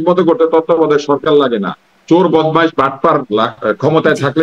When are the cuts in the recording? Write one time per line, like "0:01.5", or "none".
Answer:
none

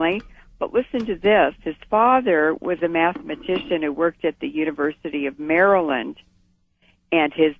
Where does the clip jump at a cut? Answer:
0:05.1

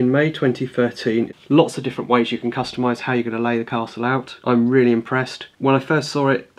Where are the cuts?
0:01.3
0:04.4
0:05.4

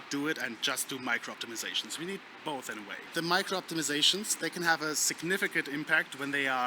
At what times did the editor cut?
0:03.0

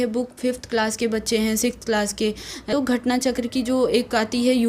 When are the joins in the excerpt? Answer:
0:02.7

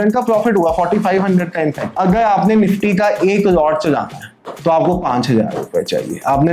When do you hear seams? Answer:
0:01.8

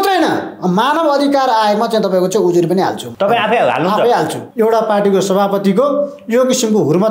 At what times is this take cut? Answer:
0:03.0
0:04.4

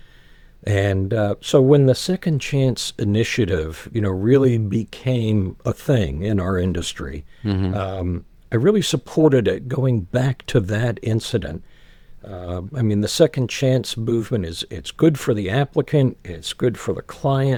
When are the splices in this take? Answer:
none

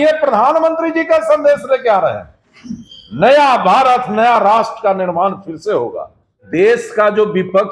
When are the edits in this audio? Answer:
0:06.4

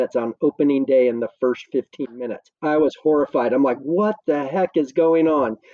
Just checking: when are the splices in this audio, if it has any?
none

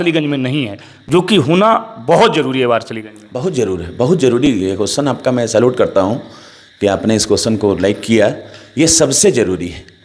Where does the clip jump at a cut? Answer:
none

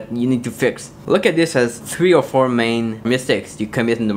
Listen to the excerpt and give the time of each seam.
0:00.9
0:01.8
0:03.0

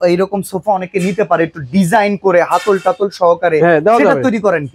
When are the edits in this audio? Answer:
none

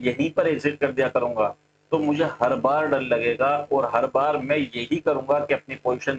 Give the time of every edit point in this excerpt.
none

